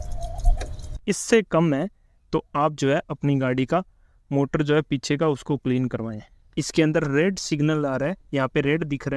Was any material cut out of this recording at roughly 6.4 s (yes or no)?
yes